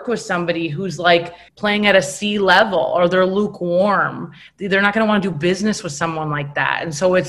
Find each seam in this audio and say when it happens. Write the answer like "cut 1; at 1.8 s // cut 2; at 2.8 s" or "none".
cut 1; at 1.4 s